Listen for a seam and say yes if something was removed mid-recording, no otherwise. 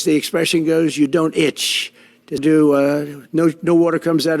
yes